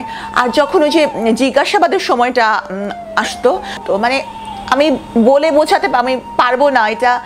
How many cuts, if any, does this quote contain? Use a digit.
1